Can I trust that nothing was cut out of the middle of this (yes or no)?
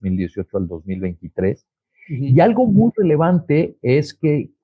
yes